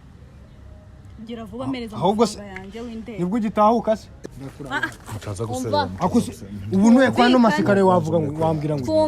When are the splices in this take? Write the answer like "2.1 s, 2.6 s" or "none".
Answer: 4.1 s

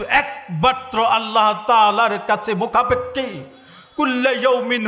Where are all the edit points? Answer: none

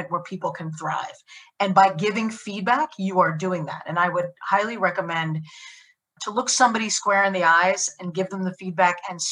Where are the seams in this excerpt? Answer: 6.0 s

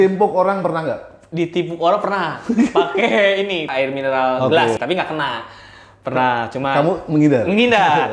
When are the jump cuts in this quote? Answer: 3.7 s, 4.8 s

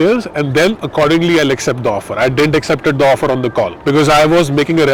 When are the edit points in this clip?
none

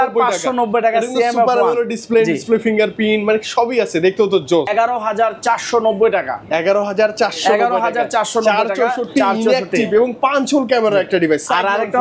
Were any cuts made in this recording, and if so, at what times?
4.7 s

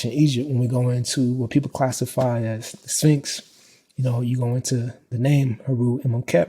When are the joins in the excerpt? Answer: 5.1 s

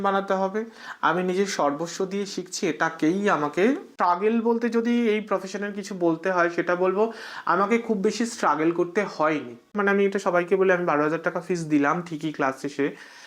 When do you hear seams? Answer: 3.9 s, 9.7 s

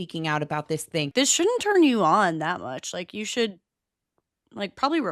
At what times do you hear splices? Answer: 1.1 s

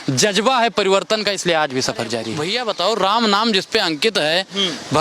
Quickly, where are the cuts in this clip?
2.3 s

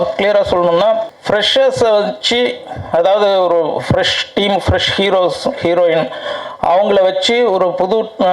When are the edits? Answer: 1.1 s

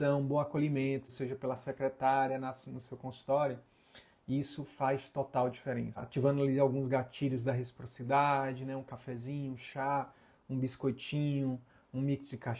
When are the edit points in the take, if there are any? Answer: 1.1 s, 6.0 s

